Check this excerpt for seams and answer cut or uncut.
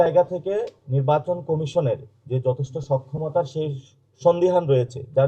uncut